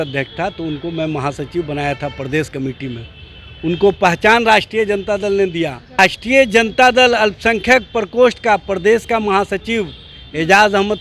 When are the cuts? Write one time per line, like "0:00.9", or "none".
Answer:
0:06.0